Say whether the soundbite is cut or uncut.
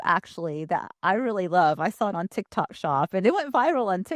uncut